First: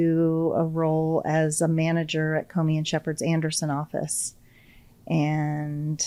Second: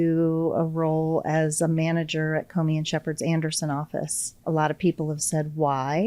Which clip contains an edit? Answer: second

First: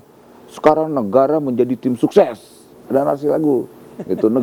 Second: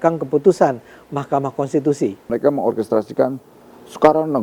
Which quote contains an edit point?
second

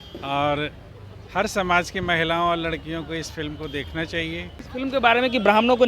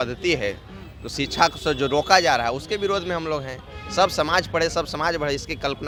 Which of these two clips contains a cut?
first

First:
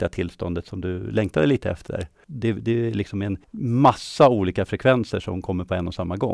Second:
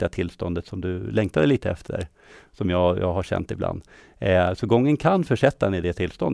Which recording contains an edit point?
first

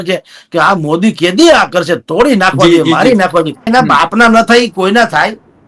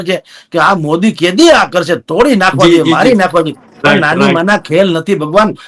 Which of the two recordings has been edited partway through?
first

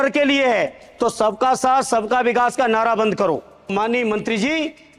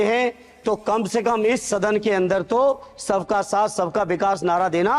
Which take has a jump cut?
first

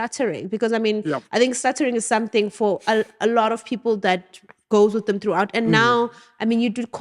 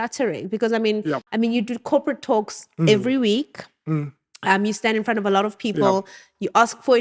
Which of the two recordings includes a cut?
second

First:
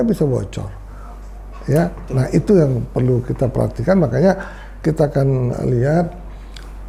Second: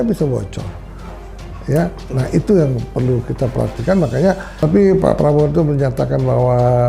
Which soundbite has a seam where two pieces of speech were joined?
second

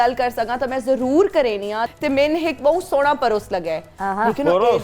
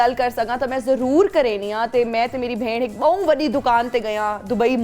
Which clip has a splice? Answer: first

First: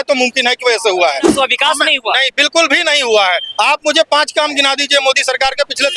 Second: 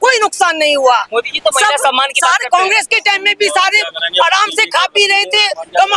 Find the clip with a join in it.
first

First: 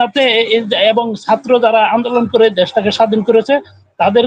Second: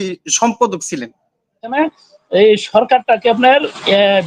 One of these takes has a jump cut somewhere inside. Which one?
second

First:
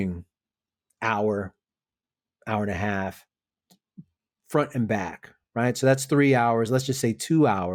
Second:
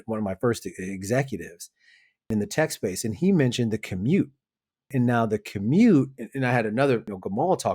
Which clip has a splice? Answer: second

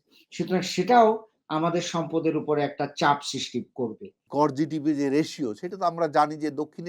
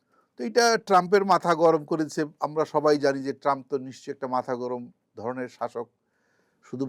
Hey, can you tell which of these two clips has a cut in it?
first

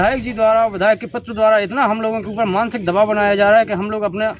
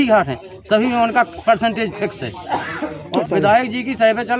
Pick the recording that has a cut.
second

